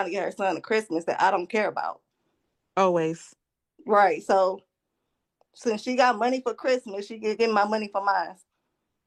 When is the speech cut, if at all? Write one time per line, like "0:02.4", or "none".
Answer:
none